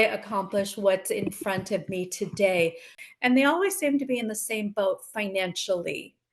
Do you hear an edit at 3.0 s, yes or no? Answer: yes